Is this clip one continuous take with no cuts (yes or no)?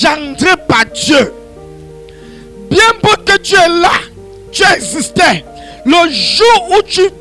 yes